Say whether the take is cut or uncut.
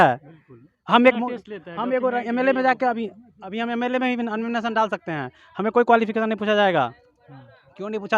uncut